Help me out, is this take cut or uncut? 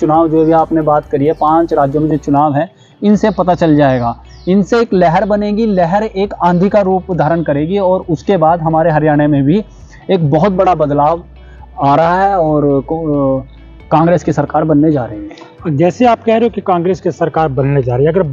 uncut